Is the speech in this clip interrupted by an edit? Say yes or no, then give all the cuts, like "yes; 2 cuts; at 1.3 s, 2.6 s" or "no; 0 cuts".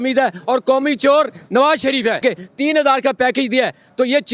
yes; 1 cut; at 2.2 s